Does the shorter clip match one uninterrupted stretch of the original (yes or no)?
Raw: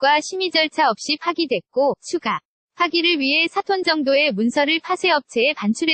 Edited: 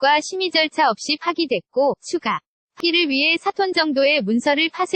no